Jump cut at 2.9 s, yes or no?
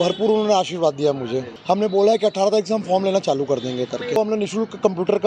no